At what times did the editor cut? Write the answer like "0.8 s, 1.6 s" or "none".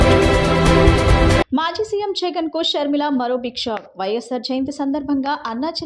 1.4 s